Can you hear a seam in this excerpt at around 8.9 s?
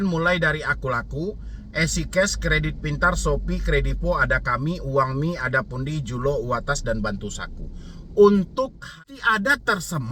yes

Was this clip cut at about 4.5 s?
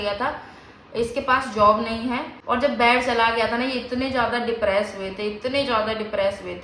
no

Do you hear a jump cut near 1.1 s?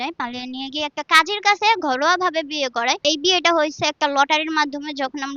no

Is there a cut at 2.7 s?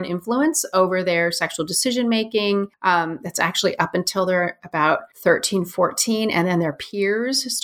yes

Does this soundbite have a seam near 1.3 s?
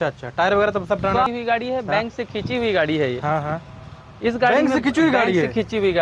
yes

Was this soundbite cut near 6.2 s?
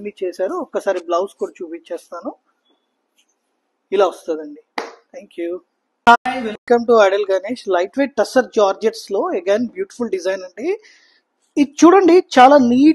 yes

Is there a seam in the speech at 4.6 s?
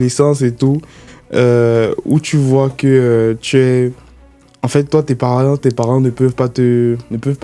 no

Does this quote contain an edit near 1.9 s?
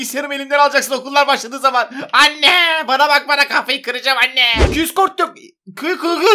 no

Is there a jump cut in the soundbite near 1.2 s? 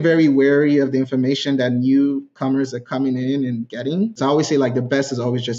no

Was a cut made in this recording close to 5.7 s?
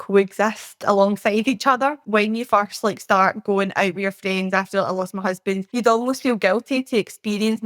yes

